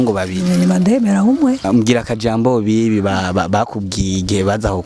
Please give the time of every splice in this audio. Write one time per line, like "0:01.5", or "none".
0:01.6